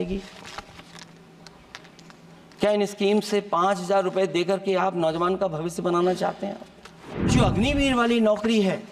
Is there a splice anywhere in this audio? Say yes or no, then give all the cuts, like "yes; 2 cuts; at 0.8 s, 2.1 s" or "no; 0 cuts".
yes; 1 cut; at 7.3 s